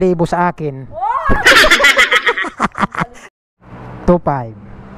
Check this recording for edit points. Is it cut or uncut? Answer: cut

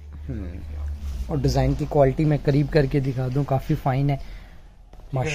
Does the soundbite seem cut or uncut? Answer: uncut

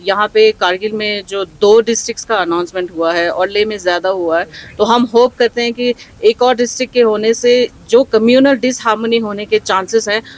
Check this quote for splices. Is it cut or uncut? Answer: uncut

